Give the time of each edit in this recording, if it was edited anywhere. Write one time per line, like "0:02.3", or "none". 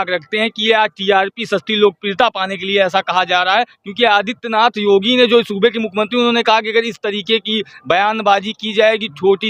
none